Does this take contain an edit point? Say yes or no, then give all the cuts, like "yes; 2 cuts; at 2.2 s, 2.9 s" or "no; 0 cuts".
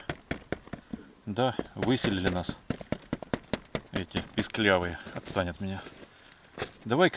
no; 0 cuts